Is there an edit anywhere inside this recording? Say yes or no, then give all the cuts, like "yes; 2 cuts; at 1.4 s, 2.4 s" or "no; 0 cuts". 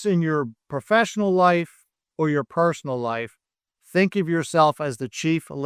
no; 0 cuts